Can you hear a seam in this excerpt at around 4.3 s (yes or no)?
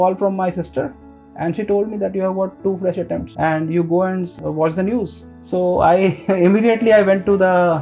yes